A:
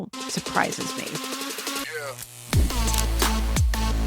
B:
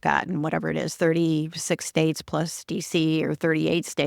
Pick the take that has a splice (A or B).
A